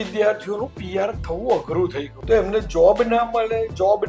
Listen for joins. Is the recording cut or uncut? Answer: cut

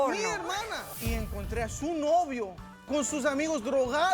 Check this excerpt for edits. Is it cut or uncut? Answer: cut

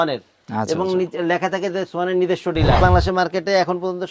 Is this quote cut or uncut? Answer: cut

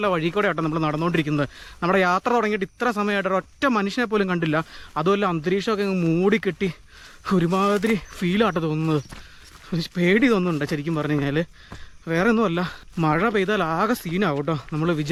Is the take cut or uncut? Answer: uncut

